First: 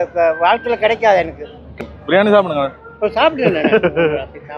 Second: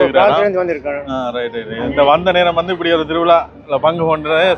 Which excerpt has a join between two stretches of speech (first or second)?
first